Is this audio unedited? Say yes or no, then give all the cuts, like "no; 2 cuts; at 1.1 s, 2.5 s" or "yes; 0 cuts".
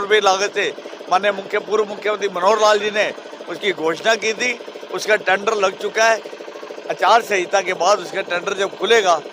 yes; 0 cuts